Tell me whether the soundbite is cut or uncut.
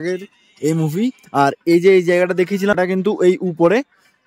uncut